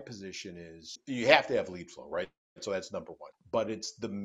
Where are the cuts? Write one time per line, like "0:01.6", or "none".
0:00.9
0:03.2